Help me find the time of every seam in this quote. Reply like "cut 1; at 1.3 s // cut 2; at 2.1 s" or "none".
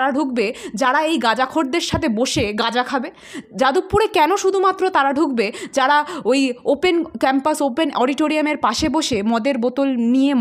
none